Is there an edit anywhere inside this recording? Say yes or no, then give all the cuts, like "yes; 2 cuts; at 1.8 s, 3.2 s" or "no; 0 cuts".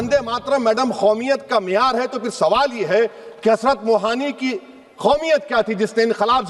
no; 0 cuts